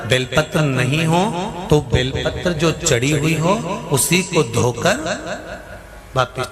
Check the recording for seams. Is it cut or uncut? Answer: uncut